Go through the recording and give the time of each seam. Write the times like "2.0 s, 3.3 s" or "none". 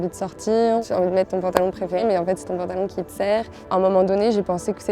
0.8 s, 2.0 s, 3.6 s